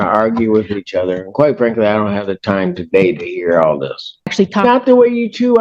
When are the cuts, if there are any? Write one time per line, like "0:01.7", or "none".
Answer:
0:04.2